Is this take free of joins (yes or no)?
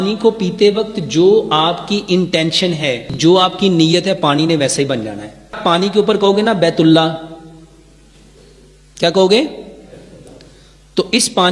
no